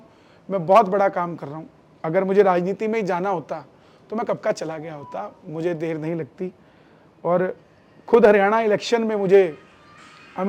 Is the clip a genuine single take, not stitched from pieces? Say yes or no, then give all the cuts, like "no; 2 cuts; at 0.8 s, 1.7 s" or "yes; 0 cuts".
yes; 0 cuts